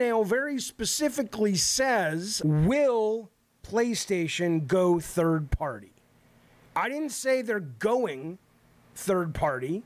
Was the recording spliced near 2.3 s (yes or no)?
yes